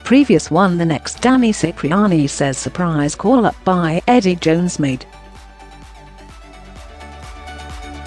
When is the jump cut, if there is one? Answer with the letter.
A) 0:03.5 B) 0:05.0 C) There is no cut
B